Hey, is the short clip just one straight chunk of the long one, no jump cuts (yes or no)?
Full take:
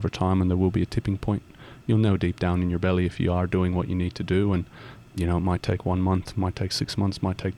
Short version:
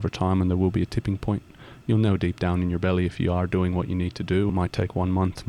no